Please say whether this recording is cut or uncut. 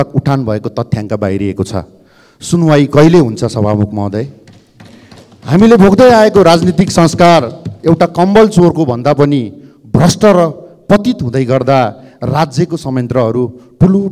uncut